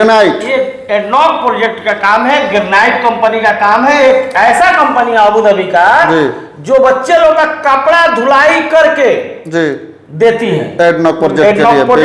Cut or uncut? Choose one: uncut